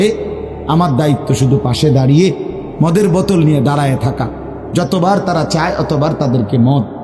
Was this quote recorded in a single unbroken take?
yes; 0 cuts

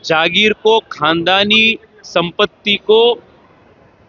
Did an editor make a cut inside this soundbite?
no; 0 cuts

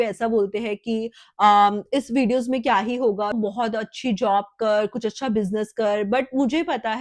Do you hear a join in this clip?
no; 0 cuts

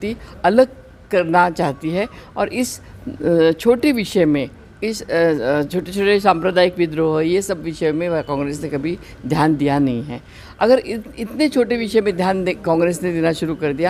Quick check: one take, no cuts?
yes; 0 cuts

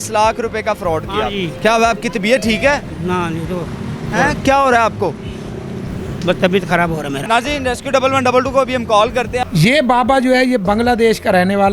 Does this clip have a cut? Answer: yes; 3 cuts; at 1.5 s, 7.2 s, 9.4 s

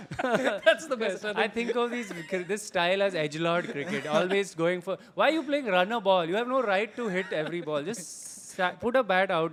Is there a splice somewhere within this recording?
no; 0 cuts

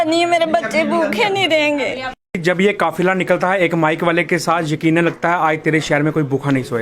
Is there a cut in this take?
yes; 1 cut; at 2.4 s

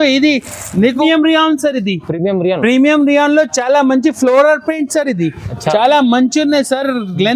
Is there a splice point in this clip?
yes; 1 cut; at 1.0 s

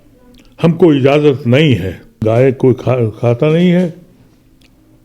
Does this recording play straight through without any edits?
no; 1 cut; at 2.1 s

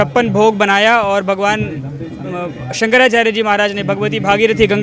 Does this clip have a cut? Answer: no; 0 cuts

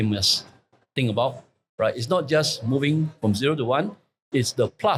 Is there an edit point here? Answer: no; 0 cuts

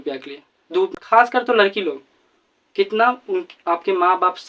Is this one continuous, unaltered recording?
no; 1 cut; at 0.9 s

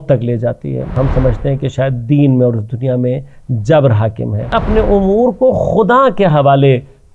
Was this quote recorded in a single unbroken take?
no; 2 cuts; at 1.0 s, 4.5 s

